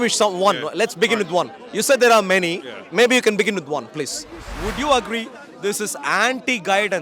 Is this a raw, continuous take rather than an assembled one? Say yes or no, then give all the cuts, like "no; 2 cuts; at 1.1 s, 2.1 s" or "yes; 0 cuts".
no; 1 cut; at 4.5 s